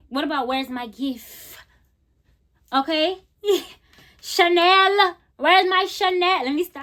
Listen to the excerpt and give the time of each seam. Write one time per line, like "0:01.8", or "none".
none